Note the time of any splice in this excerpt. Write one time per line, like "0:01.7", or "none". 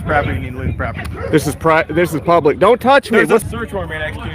0:03.4